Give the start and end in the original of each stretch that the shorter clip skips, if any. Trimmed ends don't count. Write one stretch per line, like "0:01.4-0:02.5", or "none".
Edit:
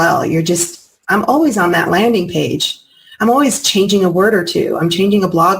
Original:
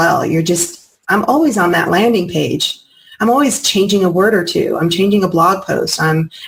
none